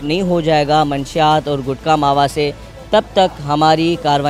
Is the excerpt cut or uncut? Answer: uncut